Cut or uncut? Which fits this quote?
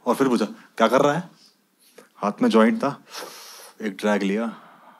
uncut